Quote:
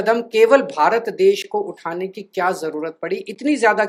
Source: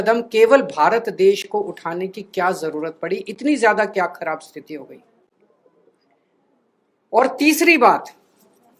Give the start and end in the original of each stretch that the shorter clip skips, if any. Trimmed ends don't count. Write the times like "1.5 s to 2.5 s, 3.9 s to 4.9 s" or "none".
none